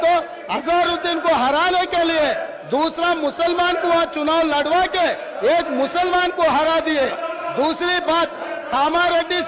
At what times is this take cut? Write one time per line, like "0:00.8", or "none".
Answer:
none